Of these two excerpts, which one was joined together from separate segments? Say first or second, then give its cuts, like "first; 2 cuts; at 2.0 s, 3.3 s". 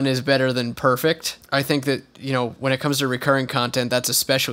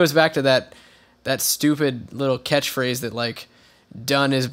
first; 1 cut; at 1.3 s